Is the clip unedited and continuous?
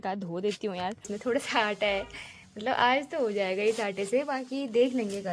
no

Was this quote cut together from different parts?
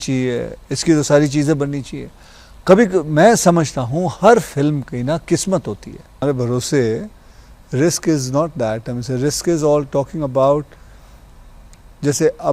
yes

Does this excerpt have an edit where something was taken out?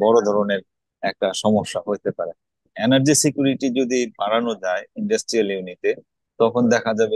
yes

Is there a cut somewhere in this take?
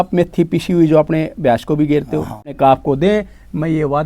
yes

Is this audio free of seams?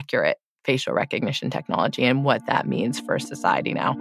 yes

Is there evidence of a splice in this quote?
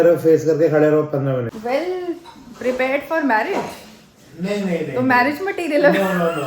yes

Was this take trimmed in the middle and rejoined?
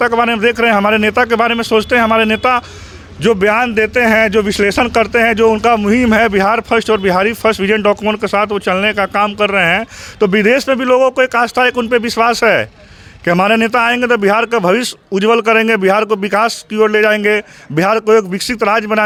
no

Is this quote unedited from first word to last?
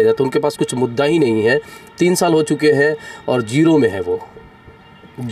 yes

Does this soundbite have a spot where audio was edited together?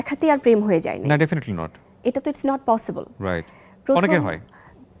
no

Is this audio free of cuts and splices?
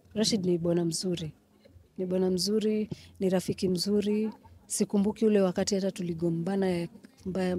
yes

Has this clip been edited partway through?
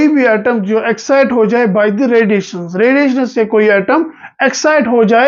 no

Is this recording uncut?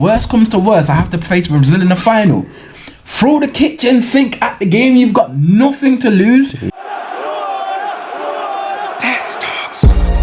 no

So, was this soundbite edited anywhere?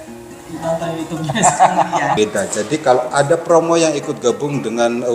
yes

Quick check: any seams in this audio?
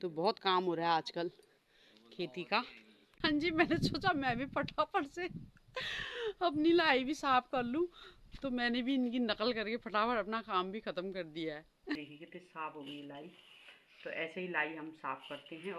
yes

